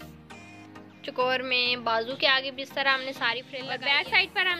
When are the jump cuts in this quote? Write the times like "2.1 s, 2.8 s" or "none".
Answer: 3.5 s